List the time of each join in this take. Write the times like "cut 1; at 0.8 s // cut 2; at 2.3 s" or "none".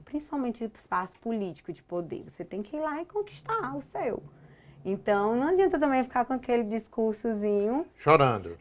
none